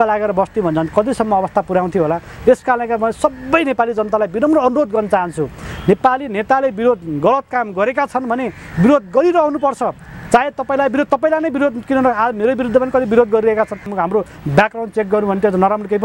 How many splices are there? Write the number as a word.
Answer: one